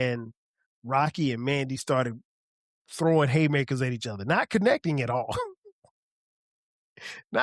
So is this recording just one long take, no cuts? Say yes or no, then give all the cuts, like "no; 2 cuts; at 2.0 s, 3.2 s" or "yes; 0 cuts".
yes; 0 cuts